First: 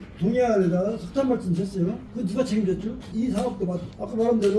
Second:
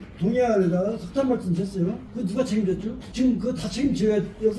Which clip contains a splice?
first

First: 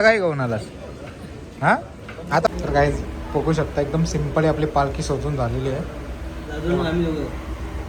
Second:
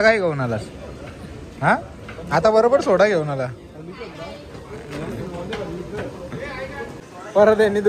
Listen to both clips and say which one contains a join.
first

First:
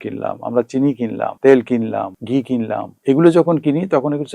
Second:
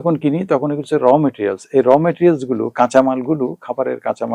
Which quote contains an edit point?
first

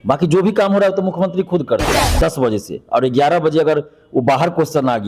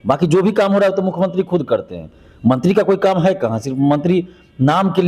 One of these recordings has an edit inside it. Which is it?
first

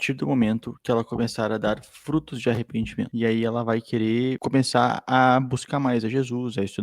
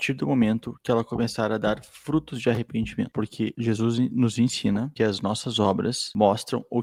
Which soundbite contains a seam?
first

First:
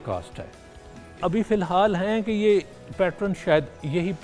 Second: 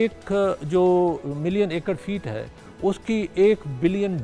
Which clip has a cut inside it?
first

